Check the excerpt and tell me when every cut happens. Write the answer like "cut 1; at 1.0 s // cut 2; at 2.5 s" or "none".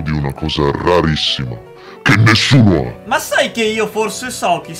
cut 1; at 3.0 s